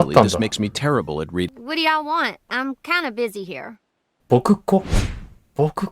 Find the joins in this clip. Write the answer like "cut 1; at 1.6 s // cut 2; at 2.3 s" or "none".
cut 1; at 1.5 s

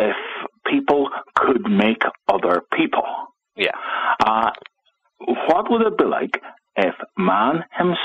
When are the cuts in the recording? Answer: none

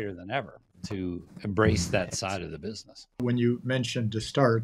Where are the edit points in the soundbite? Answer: cut 1; at 3.2 s

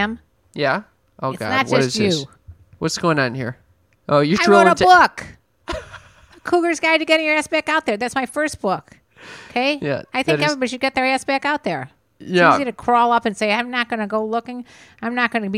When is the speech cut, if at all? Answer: cut 1; at 1.0 s

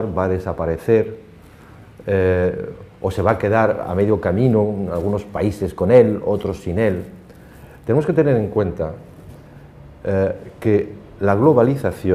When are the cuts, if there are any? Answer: cut 1; at 7.8 s

